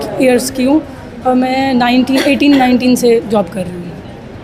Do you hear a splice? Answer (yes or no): no